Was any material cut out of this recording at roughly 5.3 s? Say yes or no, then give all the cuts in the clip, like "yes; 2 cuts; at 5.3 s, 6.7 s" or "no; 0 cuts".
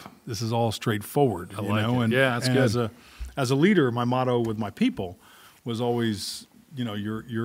no; 0 cuts